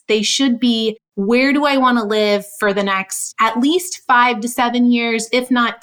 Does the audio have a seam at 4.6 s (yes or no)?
no